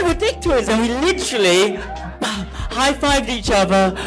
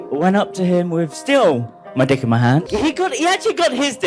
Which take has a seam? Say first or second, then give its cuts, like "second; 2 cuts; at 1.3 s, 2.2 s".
second; 1 cut; at 2.7 s